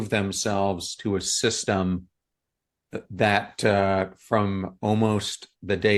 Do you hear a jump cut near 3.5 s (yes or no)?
no